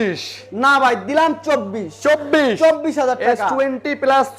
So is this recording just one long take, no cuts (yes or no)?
yes